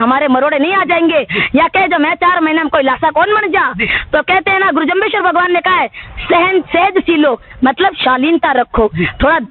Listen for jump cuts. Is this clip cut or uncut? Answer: uncut